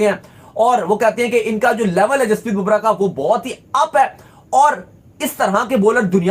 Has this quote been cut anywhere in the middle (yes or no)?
no